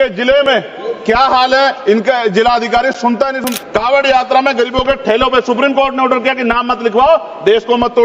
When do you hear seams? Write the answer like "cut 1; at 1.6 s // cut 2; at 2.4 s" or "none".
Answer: cut 1; at 3.5 s